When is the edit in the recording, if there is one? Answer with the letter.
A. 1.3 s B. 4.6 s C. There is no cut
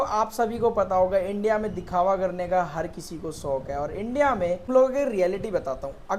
B